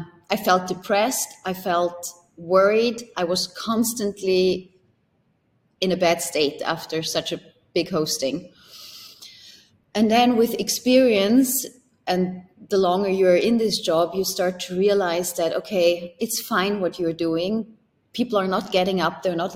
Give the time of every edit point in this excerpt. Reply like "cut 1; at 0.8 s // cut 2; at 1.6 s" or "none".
none